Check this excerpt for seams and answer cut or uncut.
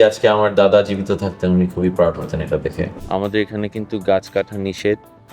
cut